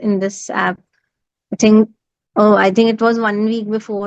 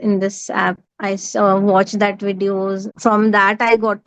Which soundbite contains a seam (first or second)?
second